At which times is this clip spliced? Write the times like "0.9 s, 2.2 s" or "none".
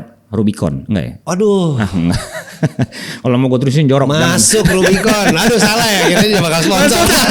none